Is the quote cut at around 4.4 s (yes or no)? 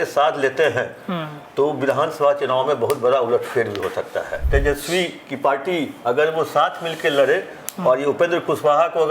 yes